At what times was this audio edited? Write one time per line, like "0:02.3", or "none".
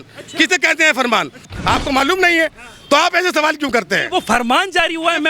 0:01.5

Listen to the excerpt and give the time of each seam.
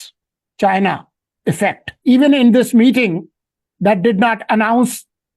0:01.9

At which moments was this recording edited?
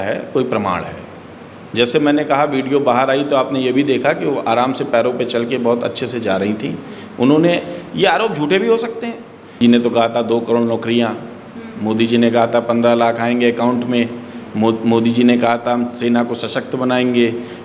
0:09.6

